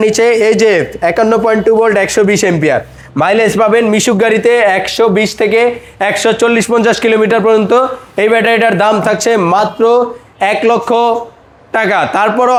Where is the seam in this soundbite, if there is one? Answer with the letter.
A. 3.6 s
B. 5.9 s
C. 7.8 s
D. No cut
D